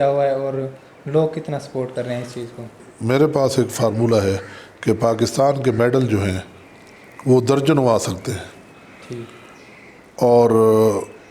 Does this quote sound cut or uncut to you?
cut